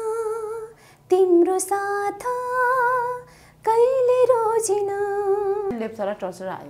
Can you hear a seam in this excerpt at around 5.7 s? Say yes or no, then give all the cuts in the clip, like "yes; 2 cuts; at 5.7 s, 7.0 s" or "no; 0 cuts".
yes; 1 cut; at 5.7 s